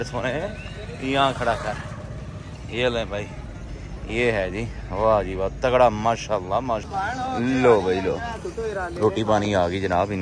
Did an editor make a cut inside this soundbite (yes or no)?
yes